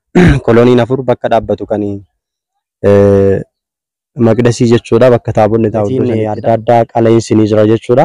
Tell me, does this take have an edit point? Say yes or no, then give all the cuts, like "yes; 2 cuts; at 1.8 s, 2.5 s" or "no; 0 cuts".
yes; 1 cut; at 6.1 s